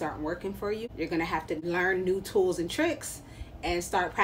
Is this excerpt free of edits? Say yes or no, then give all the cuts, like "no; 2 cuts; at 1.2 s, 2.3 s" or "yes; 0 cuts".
no; 2 cuts; at 0.8 s, 1.6 s